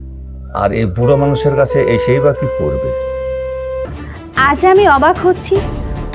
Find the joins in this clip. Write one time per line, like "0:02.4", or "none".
0:03.9